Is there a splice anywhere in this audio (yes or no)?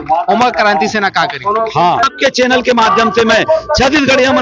yes